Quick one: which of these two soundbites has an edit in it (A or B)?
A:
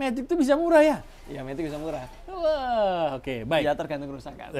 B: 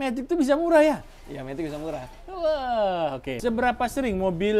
B